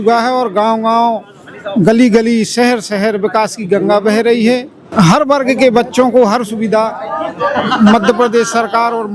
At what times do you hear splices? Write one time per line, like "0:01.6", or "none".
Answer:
0:04.8